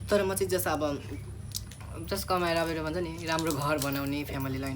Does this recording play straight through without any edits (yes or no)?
yes